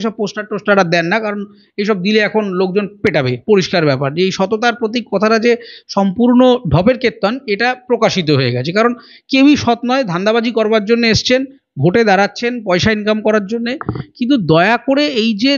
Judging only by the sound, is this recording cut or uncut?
uncut